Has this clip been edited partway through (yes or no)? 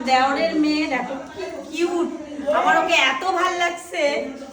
no